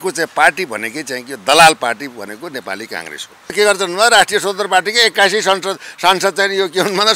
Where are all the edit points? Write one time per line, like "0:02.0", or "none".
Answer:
0:03.5